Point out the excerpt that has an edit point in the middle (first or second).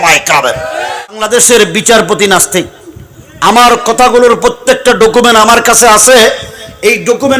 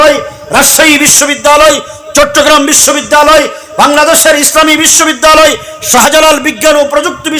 first